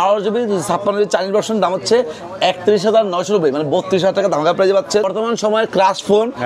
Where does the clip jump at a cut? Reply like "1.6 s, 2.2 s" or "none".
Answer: 5.1 s